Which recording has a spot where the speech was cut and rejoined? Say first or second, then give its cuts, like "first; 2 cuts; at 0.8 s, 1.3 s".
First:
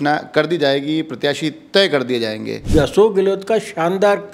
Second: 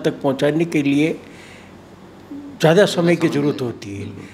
first; 1 cut; at 2.5 s